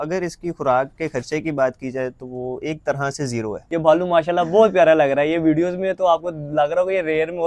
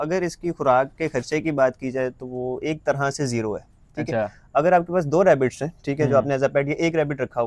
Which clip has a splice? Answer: first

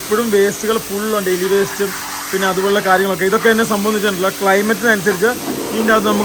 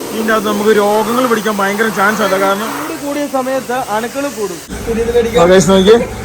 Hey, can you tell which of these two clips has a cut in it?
second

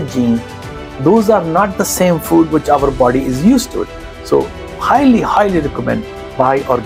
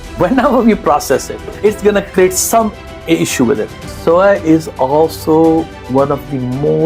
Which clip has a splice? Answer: second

